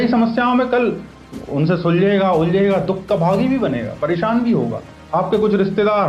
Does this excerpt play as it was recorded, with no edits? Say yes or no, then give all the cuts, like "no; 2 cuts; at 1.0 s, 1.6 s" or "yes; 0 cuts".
no; 1 cut; at 4.9 s